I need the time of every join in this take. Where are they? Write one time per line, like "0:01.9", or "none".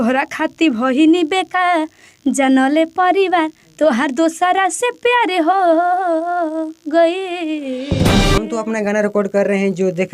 0:08.1